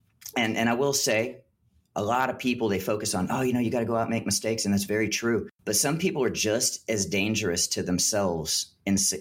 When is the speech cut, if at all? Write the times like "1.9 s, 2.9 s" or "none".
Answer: 5.5 s